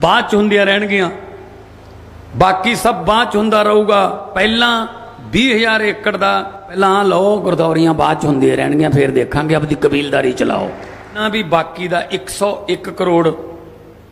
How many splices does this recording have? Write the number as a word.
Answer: three